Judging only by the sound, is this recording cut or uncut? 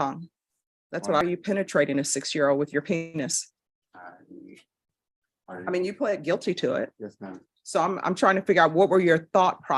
cut